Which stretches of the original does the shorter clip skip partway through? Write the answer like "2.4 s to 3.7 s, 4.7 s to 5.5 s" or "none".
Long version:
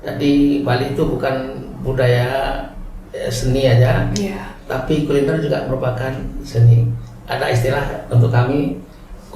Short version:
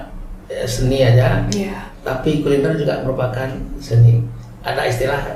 none